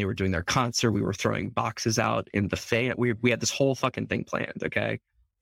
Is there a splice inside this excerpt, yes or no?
no